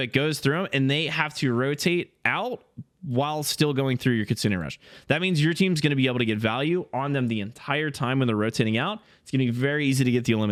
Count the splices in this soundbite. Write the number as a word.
zero